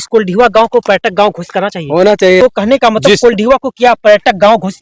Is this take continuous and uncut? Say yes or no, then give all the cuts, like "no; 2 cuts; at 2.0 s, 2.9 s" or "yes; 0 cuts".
no; 1 cut; at 2.4 s